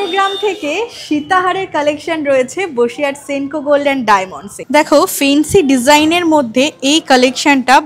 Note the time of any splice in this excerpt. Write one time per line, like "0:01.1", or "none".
0:04.6